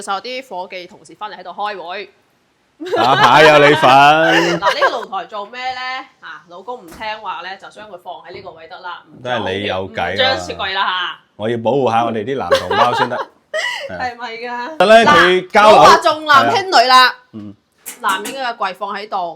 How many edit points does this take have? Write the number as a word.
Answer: two